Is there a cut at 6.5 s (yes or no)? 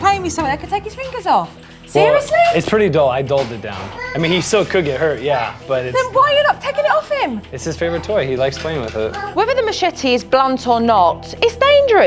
no